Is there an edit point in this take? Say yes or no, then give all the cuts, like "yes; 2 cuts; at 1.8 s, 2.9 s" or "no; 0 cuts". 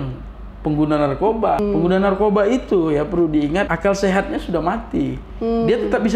yes; 2 cuts; at 1.6 s, 3.7 s